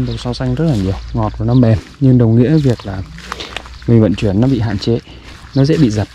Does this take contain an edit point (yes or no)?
no